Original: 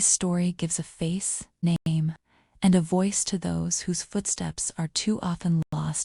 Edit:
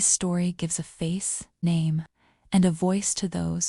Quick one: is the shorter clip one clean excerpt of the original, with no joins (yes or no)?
no